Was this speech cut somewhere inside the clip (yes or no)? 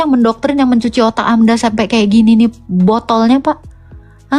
no